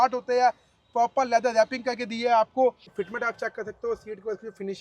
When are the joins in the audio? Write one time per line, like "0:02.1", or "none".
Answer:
0:02.9